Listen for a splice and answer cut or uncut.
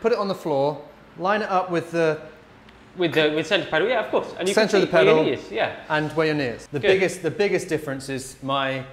cut